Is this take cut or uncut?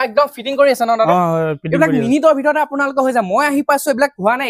uncut